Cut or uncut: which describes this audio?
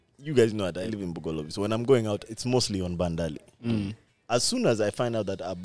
cut